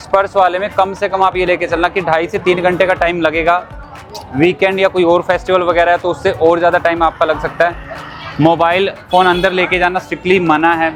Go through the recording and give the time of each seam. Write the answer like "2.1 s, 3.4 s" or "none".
none